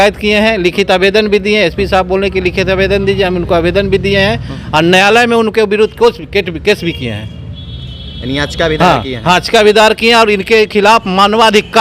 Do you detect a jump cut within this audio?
no; 0 cuts

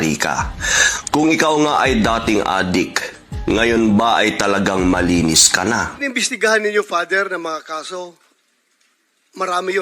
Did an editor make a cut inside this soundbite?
yes; 2 cuts; at 1.7 s, 6.0 s

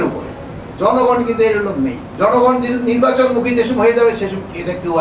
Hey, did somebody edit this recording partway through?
yes; 1 cut; at 2.0 s

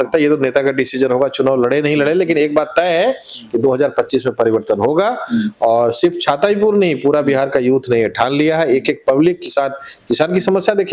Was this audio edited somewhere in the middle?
no; 0 cuts

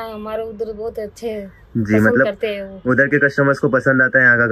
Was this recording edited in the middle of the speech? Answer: no; 0 cuts

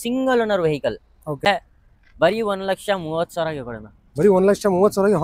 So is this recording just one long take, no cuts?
no; 1 cut; at 1.5 s

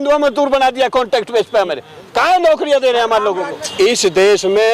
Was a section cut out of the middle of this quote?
yes; 1 cut; at 3.6 s

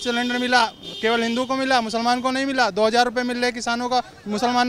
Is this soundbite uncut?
yes; 0 cuts

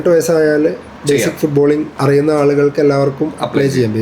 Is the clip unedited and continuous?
no; 2 cuts; at 0.9 s, 1.9 s

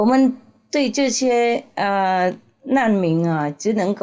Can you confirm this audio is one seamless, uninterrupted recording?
yes; 0 cuts

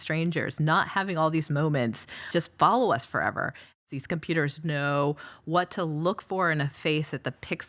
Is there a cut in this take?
yes; 2 cuts; at 2.3 s, 3.7 s

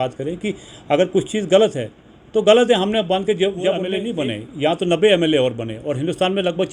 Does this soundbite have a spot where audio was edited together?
yes; 1 cut; at 4.0 s

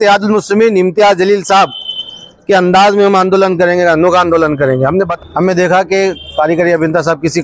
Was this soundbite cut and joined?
yes; 1 cut; at 5.1 s

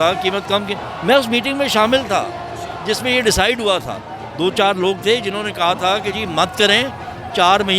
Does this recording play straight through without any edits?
yes; 0 cuts

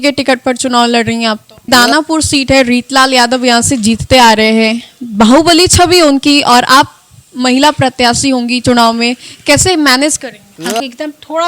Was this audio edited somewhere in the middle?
yes; 2 cuts; at 1.7 s, 10.5 s

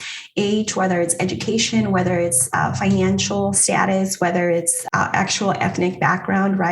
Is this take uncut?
no; 2 cuts; at 3.6 s, 4.8 s

